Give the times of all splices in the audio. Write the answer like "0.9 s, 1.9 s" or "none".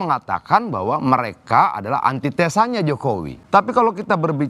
3.3 s